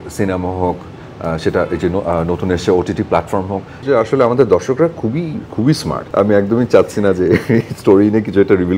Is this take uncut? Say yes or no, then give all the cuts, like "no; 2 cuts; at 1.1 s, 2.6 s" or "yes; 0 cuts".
no; 2 cuts; at 3.7 s, 6.0 s